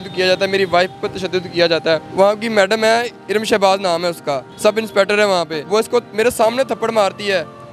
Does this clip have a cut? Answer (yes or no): yes